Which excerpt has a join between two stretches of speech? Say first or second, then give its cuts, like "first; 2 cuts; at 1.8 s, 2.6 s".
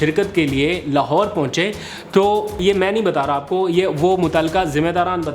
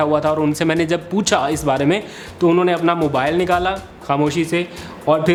first; 1 cut; at 2.6 s